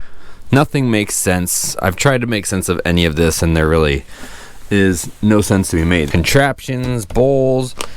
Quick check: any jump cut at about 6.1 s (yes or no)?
yes